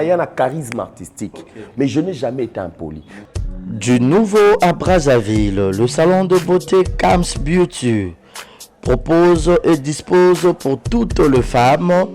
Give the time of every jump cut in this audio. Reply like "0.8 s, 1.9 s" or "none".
3.1 s